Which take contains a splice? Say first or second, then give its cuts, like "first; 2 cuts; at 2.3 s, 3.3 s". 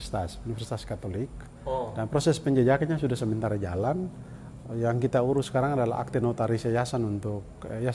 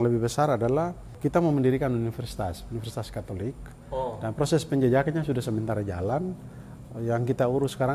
second; 1 cut; at 1.1 s